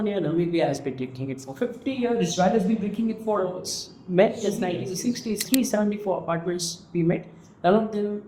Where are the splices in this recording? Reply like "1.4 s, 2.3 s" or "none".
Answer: 5.4 s